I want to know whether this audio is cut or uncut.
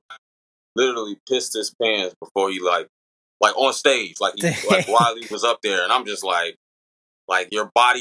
uncut